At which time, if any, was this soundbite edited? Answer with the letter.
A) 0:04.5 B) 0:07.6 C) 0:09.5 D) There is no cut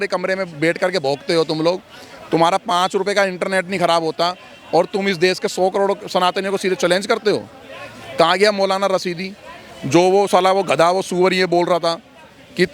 D